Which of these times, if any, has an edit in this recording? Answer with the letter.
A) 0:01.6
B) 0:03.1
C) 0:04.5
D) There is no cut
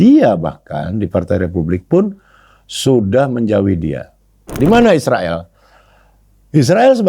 C